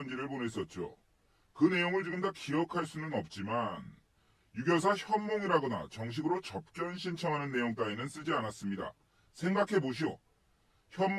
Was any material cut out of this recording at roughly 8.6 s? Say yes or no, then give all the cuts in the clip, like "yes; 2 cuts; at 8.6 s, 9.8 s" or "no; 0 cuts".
no; 1 cut; at 6.9 s